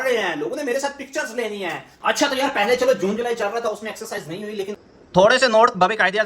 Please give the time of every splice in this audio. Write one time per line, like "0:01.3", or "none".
0:01.9
0:04.7